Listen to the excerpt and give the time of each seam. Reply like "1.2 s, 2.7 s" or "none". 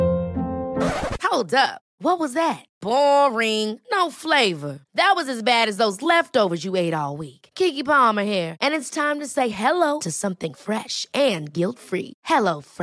none